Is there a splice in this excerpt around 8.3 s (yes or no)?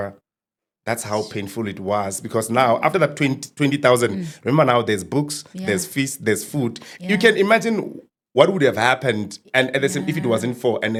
no